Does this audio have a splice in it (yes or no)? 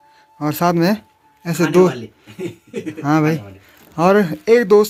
no